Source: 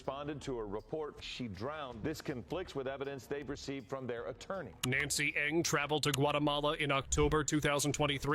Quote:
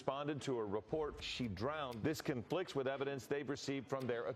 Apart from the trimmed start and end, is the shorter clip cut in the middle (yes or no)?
no